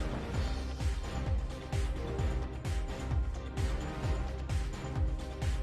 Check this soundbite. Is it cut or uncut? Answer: uncut